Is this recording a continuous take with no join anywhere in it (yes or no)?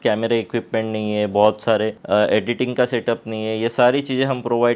no